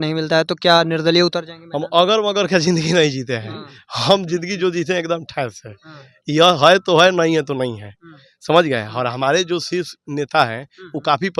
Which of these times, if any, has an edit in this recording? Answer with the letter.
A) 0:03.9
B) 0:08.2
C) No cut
C